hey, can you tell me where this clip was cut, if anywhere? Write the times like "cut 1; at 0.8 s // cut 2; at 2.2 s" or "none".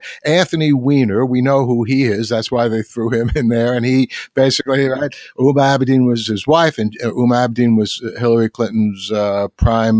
cut 1; at 6.3 s